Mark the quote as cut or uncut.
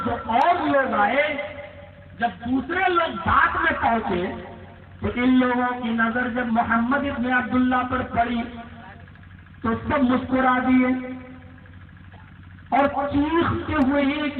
uncut